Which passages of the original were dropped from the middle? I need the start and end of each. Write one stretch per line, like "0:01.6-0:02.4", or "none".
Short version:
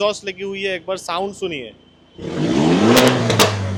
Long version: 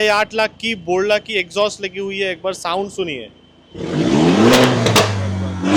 none